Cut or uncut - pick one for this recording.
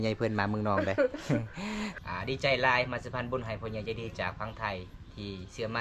cut